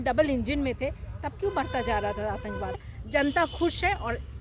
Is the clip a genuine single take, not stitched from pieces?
no; 1 cut; at 2.8 s

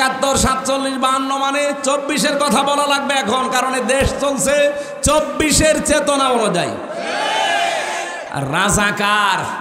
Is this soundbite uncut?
no; 1 cut; at 8.3 s

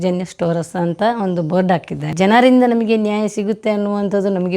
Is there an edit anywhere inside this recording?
yes; 1 cut; at 2.1 s

